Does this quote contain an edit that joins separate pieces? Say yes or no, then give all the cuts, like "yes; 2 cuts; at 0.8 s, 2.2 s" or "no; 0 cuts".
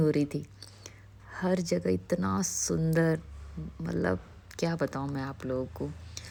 no; 0 cuts